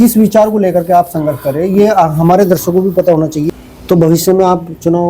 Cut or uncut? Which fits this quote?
cut